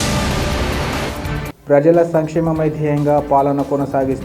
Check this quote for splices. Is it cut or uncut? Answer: cut